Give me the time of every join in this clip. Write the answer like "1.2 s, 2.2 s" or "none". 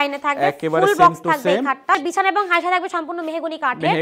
2.0 s